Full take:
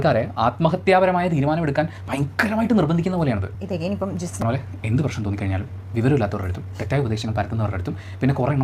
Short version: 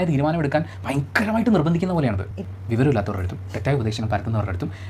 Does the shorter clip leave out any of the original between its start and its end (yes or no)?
yes